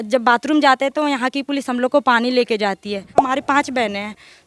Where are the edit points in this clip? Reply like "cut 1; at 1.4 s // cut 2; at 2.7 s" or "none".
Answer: cut 1; at 3.2 s